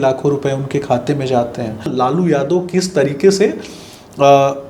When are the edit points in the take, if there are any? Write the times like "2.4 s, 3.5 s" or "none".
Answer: 1.9 s